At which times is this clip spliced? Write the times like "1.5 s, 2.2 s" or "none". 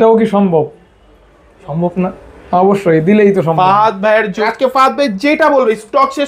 4.4 s

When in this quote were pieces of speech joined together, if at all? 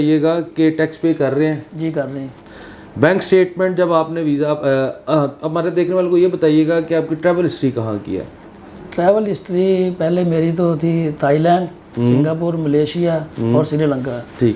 none

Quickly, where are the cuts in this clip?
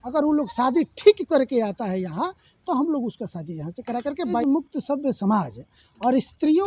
4.4 s

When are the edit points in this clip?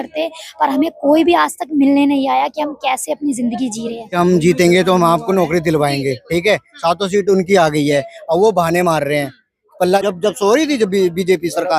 4.1 s, 10.0 s

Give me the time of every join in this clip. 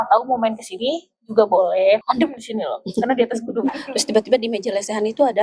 2.0 s, 3.8 s

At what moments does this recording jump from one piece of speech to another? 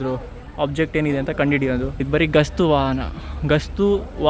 2.0 s

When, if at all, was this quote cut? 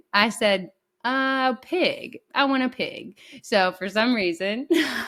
none

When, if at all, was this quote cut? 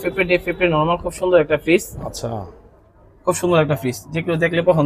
none

